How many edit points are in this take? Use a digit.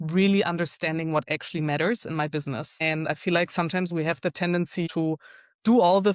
2